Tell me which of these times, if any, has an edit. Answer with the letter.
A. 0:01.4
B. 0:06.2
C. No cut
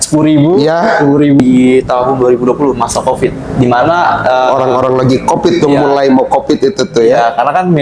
A